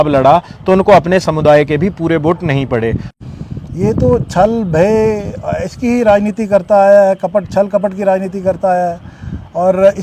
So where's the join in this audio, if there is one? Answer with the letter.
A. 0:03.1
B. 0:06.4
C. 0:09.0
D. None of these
A